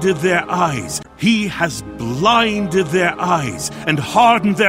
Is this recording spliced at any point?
no; 0 cuts

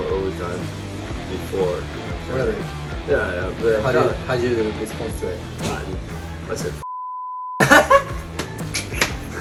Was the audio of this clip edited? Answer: no; 0 cuts

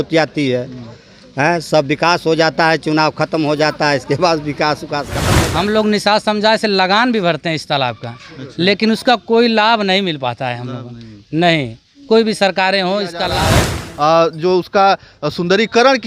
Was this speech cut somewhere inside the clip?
yes; 2 cuts; at 5.2 s, 13.5 s

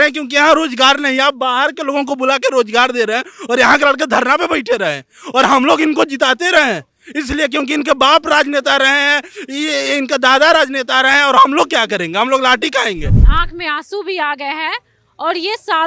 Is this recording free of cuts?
no; 1 cut; at 13.2 s

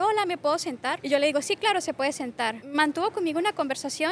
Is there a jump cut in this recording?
yes; 2 cuts; at 1.0 s, 2.6 s

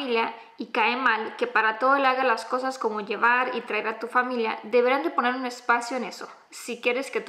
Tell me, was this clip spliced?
no; 0 cuts

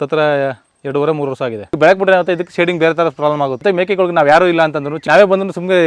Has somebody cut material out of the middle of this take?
yes; 3 cuts; at 1.6 s, 3.6 s, 4.9 s

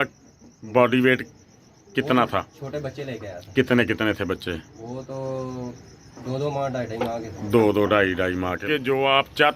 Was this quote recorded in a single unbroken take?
no; 1 cut; at 8.6 s

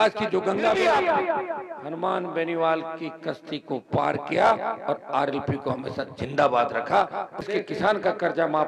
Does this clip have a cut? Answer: yes; 2 cuts; at 0.8 s, 7.5 s

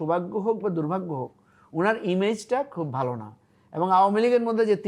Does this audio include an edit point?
no; 0 cuts

